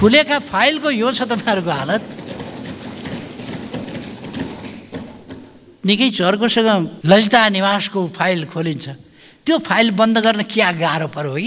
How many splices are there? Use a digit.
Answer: 1